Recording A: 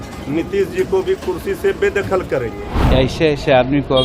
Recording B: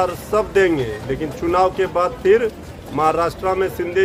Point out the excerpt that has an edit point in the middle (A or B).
A